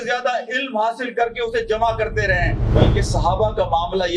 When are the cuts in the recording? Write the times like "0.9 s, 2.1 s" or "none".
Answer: 2.7 s